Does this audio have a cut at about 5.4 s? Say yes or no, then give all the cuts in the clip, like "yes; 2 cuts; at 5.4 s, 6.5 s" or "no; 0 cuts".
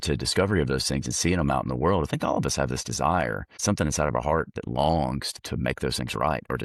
yes; 2 cuts; at 3.5 s, 5.4 s